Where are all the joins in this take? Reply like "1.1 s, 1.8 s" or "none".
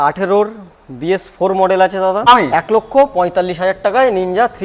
2.3 s